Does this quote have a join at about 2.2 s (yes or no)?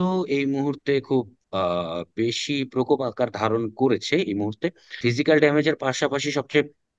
no